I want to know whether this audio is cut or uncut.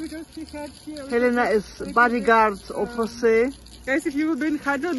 cut